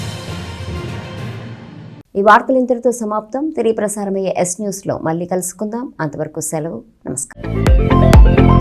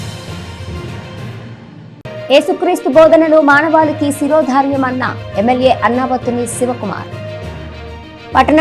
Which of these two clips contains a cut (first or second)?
second